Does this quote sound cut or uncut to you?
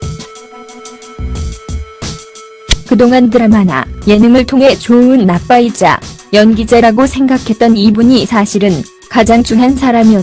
uncut